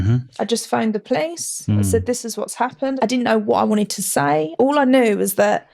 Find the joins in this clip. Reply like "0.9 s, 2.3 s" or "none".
2.9 s, 4.5 s

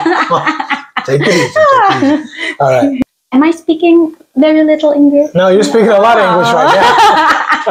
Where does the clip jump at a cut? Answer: 3.1 s

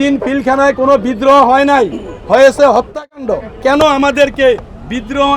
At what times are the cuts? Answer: 3.6 s

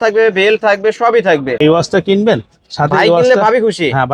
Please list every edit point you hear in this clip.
1.7 s

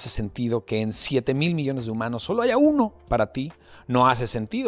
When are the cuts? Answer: none

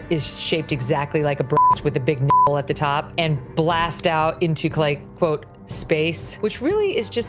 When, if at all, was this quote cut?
none

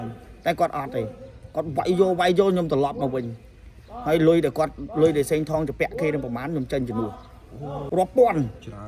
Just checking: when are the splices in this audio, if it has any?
7.8 s

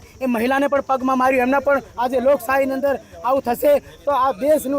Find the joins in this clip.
1.9 s

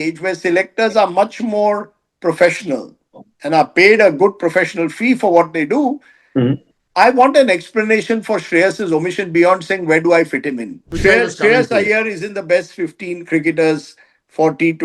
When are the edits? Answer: 10.9 s

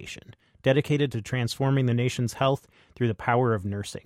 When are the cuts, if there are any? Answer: none

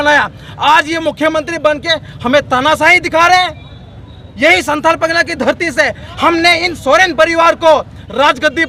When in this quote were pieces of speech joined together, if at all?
none

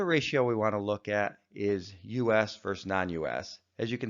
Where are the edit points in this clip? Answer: 2.3 s

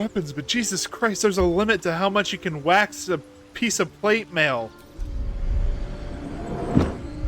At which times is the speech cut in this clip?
5.1 s

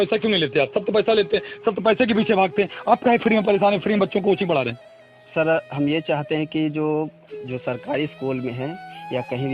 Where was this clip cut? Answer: none

